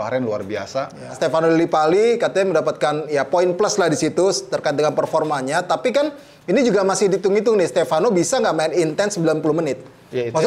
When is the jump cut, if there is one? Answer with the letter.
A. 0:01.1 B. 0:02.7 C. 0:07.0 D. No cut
A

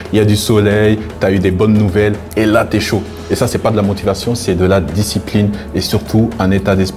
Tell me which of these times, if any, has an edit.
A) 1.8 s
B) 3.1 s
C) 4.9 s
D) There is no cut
B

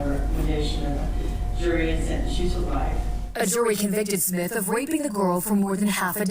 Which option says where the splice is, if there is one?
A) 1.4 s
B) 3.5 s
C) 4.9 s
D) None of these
B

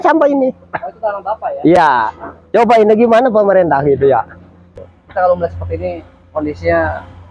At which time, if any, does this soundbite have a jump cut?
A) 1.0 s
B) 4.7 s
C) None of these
B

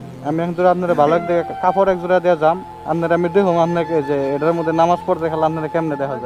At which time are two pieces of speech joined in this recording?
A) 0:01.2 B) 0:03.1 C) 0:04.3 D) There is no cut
D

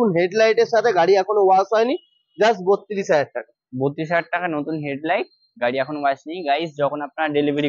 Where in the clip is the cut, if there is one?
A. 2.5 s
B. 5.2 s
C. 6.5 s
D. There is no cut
D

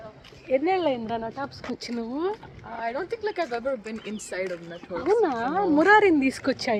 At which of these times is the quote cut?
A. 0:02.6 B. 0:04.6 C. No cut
C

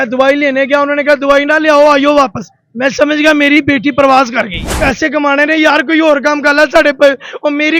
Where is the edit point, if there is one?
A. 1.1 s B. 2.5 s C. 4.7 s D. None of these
C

